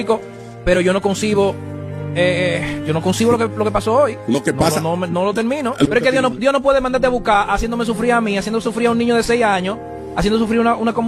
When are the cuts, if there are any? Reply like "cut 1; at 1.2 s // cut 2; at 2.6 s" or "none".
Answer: none